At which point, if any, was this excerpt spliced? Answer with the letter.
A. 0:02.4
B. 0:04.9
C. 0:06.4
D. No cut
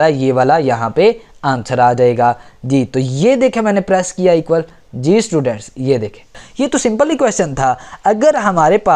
C